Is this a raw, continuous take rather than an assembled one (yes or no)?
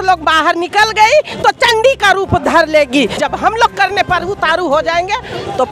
no